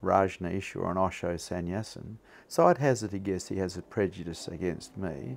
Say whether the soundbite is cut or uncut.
uncut